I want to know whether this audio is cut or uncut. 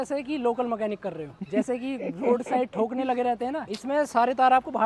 cut